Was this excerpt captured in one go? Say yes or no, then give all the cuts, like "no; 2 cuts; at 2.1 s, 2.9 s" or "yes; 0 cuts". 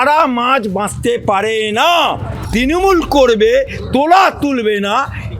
no; 1 cut; at 2.3 s